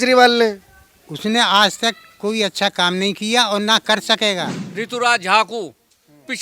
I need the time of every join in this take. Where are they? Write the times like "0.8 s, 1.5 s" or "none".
4.6 s